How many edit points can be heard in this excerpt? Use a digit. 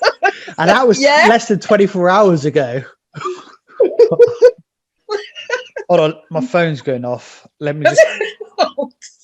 1